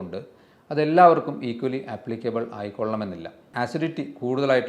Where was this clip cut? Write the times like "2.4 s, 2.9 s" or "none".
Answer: 3.5 s